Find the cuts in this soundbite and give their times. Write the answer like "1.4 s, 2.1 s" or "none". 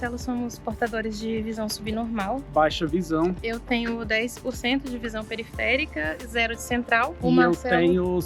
none